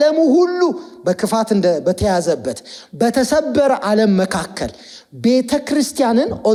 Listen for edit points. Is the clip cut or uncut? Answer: uncut